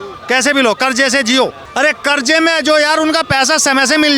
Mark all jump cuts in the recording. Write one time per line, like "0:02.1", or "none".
0:01.6